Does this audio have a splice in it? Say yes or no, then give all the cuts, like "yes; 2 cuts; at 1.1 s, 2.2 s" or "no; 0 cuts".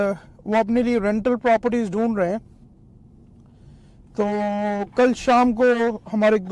no; 0 cuts